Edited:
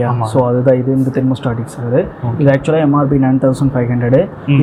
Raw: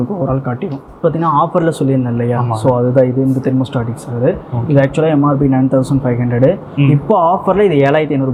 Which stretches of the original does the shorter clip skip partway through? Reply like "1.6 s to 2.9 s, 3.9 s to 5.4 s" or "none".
none